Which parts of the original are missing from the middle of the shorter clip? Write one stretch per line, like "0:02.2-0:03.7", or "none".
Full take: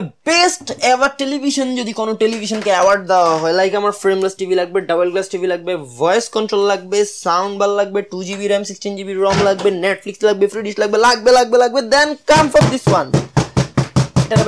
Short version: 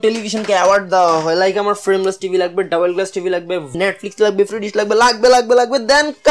0:05.9-0:09.8